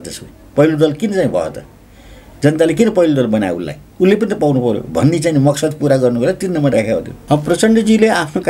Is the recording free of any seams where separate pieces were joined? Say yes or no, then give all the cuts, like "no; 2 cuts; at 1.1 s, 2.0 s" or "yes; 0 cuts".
no; 1 cut; at 7.1 s